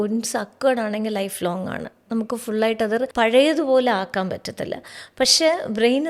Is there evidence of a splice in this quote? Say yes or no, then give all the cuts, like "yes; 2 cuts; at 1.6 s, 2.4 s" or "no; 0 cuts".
yes; 1 cut; at 3.1 s